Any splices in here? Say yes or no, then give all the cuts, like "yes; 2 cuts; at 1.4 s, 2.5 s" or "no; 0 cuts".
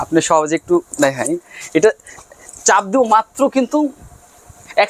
no; 0 cuts